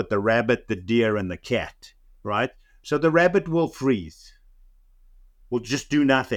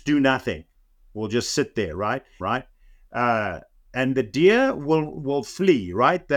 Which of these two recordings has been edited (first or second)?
second